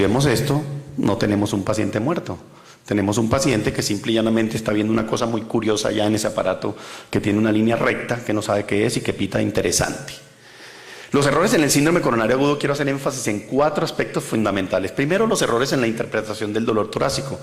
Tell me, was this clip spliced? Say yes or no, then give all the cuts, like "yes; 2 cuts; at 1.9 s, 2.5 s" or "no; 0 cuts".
yes; 1 cut; at 8.4 s